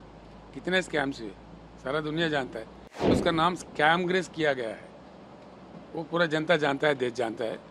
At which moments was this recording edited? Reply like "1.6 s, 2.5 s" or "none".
3.1 s